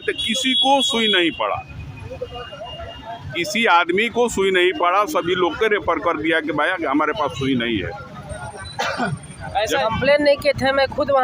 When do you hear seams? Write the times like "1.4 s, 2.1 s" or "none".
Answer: 9.8 s

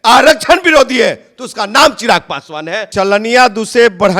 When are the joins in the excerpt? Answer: 2.9 s

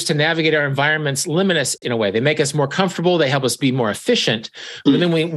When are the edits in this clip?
1.8 s

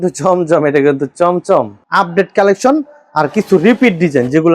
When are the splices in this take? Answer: 1.8 s

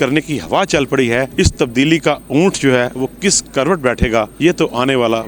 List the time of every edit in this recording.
1.3 s, 4.3 s

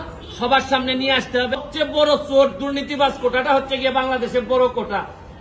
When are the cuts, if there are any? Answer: 1.6 s

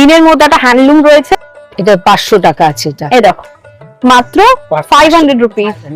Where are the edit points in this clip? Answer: 1.6 s

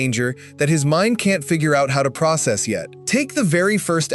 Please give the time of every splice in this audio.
2.9 s

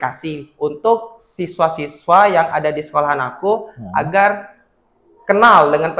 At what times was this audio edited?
none

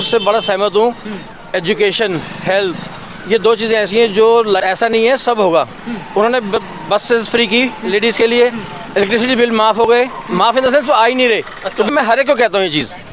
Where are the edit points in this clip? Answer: 4.6 s, 11.9 s

